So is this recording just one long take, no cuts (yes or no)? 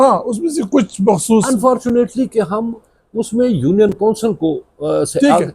yes